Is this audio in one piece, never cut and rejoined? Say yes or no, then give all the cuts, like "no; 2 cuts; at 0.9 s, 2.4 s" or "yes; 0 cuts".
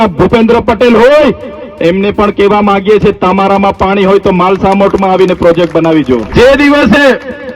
no; 1 cut; at 6.3 s